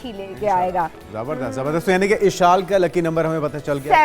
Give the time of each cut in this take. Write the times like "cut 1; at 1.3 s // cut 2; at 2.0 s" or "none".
none